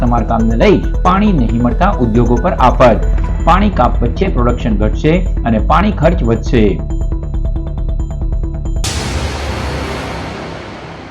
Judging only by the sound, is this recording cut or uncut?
cut